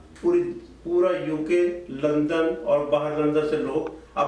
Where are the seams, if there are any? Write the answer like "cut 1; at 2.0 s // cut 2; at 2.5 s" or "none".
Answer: none

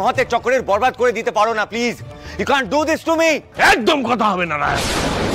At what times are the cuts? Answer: none

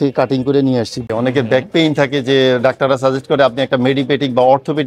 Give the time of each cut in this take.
cut 1; at 1.0 s

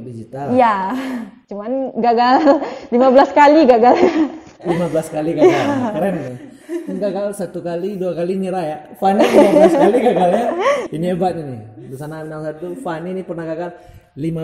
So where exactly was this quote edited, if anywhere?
none

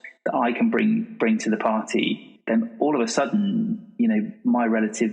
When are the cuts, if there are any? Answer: cut 1; at 2.3 s

